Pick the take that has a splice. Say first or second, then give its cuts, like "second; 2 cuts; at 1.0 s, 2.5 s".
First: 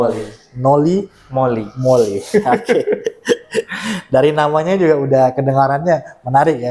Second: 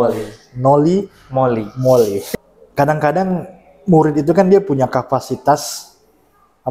second; 1 cut; at 2.2 s